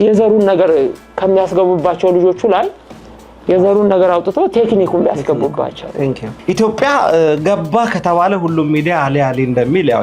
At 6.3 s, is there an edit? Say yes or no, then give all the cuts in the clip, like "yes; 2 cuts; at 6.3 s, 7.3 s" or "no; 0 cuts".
yes; 1 cut; at 6.3 s